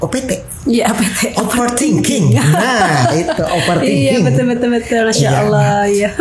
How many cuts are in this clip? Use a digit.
0